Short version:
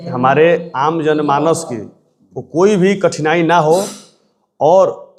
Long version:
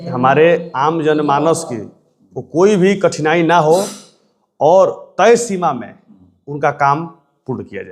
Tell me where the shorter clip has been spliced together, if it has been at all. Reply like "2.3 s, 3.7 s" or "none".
none